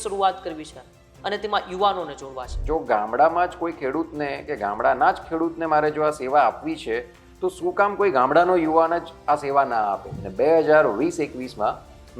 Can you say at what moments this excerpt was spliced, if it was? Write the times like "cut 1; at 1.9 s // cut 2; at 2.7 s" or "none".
cut 1; at 2.6 s // cut 2; at 10.2 s